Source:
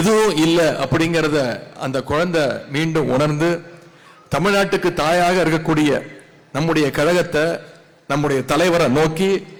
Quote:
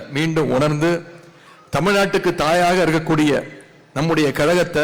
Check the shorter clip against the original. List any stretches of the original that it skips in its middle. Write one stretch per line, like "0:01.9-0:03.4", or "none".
none